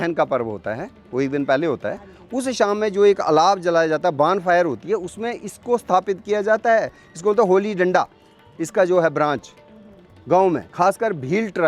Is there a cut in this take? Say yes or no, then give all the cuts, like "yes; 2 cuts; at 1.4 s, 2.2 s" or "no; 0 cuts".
no; 0 cuts